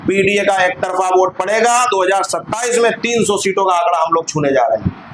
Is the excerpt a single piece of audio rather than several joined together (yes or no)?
yes